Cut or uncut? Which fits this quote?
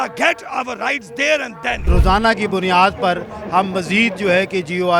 cut